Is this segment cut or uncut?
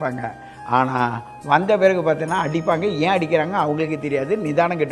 uncut